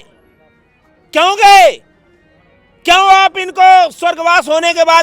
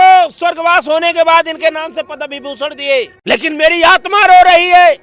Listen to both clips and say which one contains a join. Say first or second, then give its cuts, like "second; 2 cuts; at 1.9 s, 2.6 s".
second; 1 cut; at 3.1 s